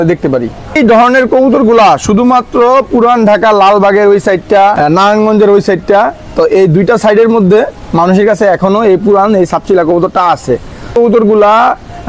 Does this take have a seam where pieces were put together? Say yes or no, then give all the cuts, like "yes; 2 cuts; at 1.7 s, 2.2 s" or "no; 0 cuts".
yes; 3 cuts; at 0.8 s, 4.8 s, 10.9 s